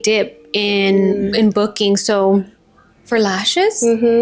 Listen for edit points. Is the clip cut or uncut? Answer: cut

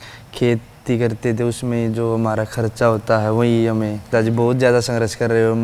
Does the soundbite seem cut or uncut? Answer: cut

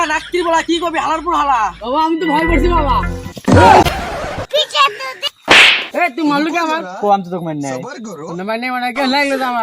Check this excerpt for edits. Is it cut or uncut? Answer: cut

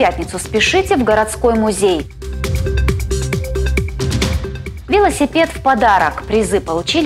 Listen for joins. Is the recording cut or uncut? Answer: uncut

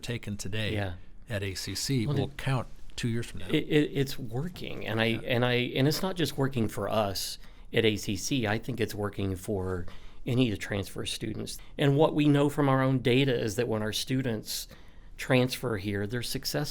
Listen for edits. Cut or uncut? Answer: cut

